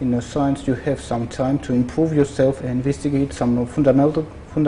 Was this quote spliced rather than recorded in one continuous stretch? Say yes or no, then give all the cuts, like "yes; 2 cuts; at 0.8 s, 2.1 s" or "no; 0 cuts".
no; 0 cuts